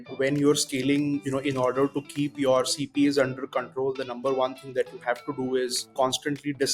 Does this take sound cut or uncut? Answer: cut